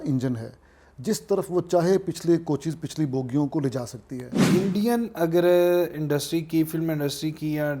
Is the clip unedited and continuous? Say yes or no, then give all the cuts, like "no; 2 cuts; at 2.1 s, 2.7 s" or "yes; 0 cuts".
no; 1 cut; at 4.4 s